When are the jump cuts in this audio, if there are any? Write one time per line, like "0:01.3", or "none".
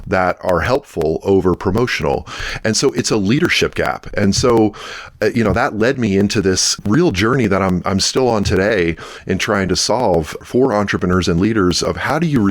0:06.7
0:10.4